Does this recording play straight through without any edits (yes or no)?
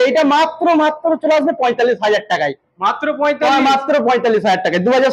yes